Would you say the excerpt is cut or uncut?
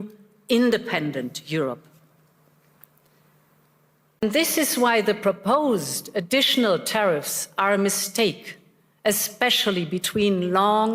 cut